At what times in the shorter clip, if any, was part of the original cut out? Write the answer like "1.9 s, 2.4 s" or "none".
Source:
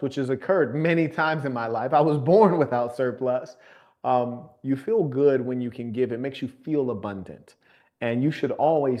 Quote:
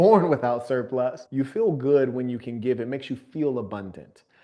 1.2 s